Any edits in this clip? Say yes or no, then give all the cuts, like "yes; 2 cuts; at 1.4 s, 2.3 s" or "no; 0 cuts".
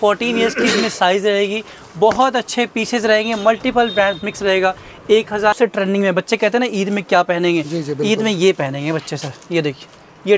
yes; 1 cut; at 5.6 s